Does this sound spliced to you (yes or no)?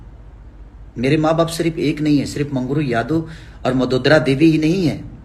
no